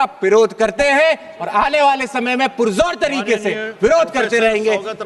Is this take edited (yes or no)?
no